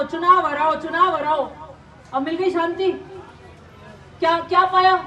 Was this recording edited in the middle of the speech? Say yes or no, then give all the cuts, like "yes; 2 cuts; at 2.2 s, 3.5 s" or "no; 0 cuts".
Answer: no; 0 cuts